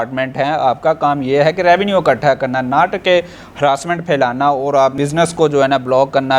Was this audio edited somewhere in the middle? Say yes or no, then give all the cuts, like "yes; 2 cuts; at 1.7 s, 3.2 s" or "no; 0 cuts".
no; 0 cuts